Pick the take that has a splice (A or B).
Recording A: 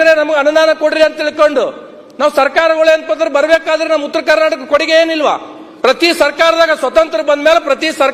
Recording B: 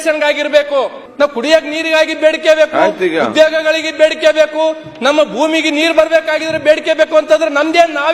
B